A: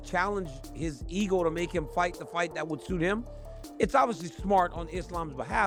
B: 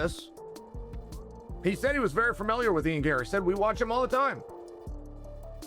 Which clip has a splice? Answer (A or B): B